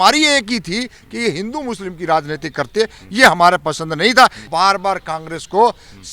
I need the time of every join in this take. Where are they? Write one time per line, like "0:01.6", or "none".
0:04.4